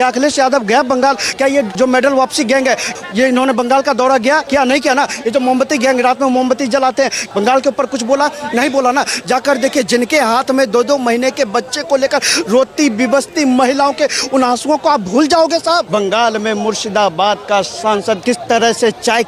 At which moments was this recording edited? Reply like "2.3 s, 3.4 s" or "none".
1.7 s, 3.0 s, 4.4 s, 7.2 s, 15.9 s, 18.2 s